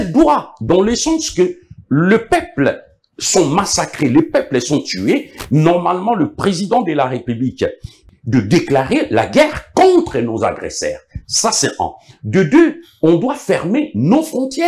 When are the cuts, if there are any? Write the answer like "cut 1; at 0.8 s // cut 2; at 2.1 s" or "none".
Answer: cut 1; at 8.0 s